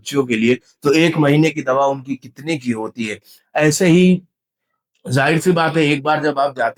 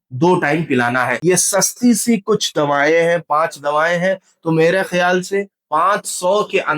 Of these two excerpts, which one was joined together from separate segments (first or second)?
second